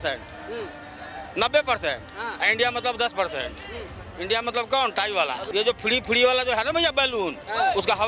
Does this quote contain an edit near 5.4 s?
yes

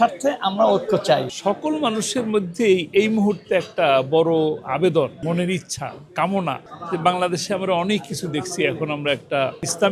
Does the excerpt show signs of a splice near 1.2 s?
yes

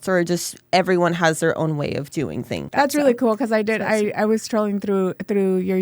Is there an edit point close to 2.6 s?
yes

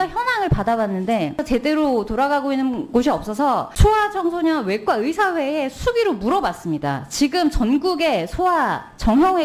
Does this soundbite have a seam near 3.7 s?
yes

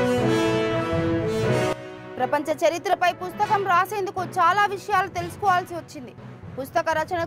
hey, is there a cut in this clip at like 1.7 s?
yes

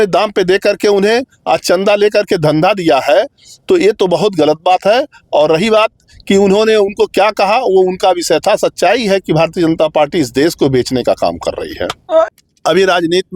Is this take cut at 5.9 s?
no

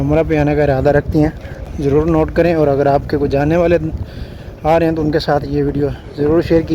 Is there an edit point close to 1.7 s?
yes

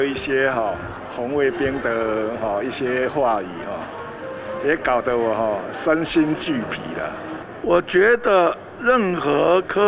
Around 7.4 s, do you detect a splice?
yes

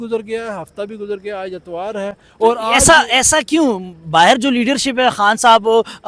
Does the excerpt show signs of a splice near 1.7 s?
no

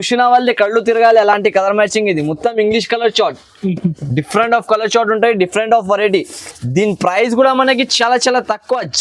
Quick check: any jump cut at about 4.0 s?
no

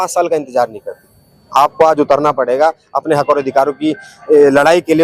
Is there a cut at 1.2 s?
no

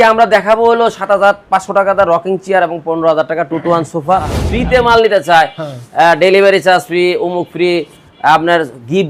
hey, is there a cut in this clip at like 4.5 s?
yes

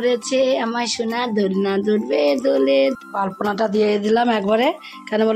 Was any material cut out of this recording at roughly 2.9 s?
yes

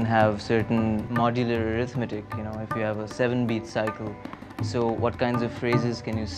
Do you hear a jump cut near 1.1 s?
yes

